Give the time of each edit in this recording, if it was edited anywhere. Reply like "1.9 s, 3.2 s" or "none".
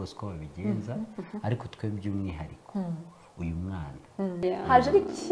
4.4 s